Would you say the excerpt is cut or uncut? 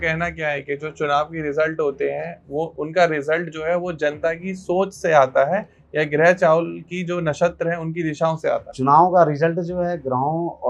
cut